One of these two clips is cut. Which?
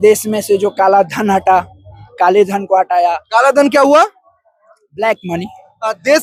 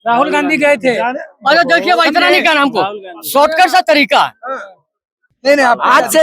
second; 1 cut; at 5.2 s

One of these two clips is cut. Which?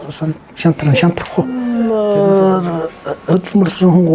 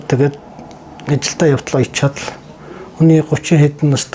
first; 1 cut; at 1.7 s

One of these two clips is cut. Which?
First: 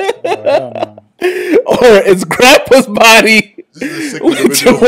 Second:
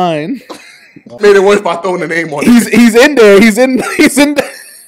second; 1 cut; at 1.2 s

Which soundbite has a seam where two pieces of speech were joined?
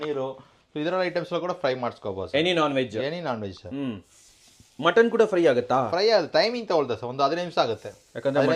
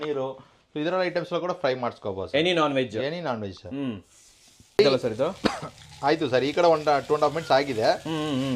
second; 1 cut; at 4.8 s

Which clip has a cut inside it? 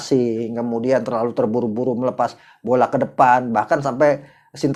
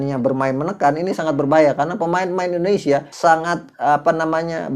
second; 1 cut; at 3.1 s

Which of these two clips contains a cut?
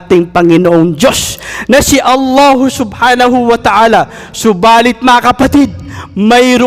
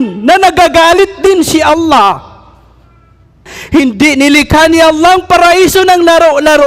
second; 1 cut; at 3.5 s

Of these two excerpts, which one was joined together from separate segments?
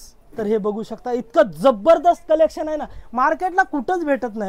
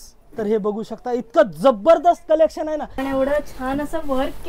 second; 1 cut; at 3.0 s

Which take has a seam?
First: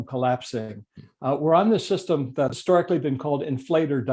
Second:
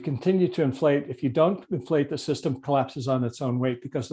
first; 1 cut; at 2.6 s

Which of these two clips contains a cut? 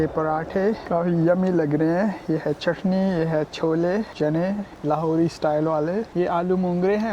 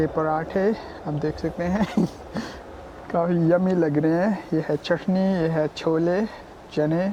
first; 3 cuts; at 0.8 s, 4.4 s, 6.1 s

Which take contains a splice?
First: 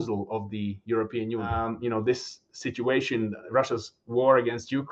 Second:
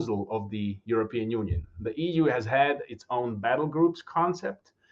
first; 1 cut; at 1.6 s

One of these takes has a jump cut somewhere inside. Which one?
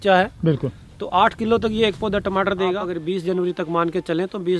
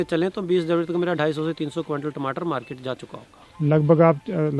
first; 1 cut; at 2.9 s

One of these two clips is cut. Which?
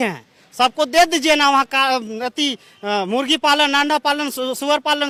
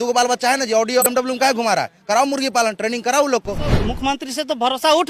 second; 2 cuts; at 1.1 s, 3.7 s

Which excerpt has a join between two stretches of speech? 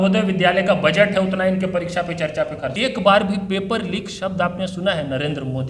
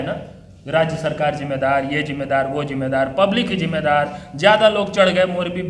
first; 1 cut; at 2.7 s

